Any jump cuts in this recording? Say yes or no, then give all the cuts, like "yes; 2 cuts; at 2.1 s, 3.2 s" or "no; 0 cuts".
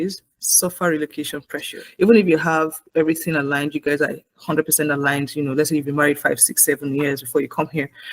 yes; 1 cut; at 1.8 s